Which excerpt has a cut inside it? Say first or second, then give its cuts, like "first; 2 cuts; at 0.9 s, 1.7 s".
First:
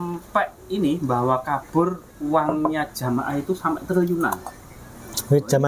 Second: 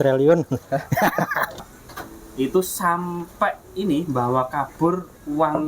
second; 1 cut; at 1.7 s